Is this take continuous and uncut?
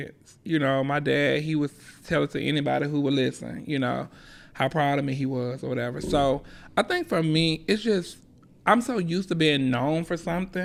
yes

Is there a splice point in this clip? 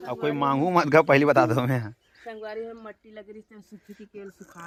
no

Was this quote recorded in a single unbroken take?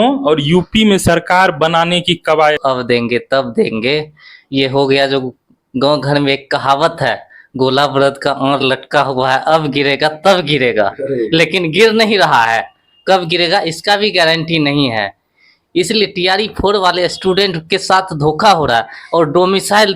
no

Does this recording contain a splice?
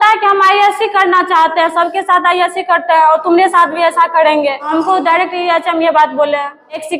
no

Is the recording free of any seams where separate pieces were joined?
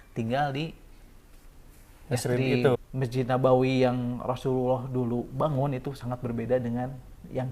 no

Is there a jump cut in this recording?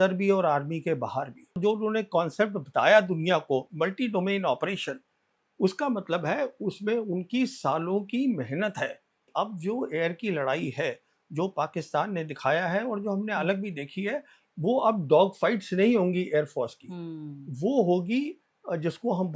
yes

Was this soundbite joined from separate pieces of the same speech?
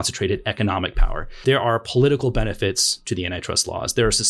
yes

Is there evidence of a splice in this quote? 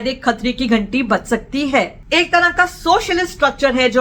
yes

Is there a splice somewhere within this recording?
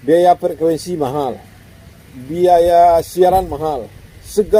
no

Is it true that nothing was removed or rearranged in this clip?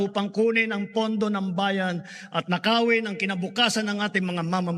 yes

